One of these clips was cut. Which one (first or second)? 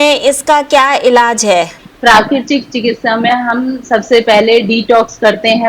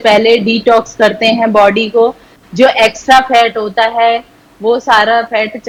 first